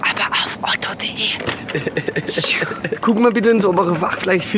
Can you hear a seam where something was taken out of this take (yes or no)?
yes